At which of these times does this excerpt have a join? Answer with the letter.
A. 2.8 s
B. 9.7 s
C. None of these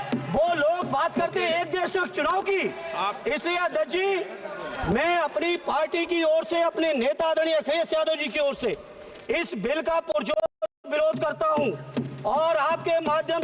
C